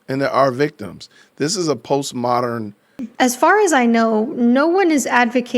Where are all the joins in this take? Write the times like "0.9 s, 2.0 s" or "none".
3.0 s